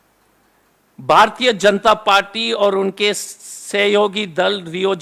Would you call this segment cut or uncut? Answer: uncut